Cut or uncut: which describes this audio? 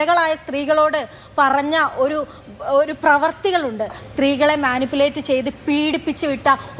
cut